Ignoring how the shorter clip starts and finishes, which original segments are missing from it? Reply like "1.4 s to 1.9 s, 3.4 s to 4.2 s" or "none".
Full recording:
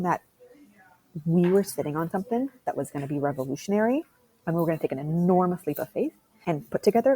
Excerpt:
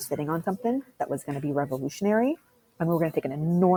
none